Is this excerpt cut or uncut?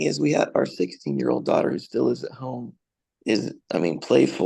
uncut